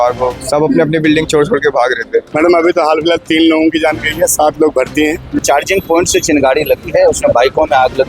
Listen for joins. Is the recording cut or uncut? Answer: cut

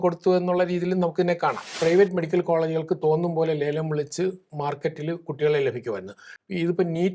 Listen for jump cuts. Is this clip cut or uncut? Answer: cut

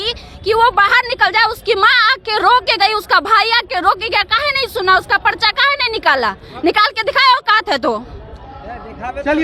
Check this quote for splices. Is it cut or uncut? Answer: uncut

